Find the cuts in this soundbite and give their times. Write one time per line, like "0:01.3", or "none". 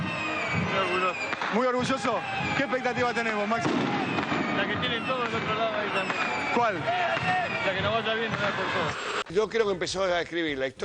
0:09.3